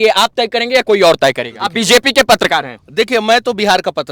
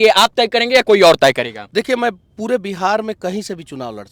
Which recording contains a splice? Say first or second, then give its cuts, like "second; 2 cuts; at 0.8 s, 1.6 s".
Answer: first; 1 cut; at 1.6 s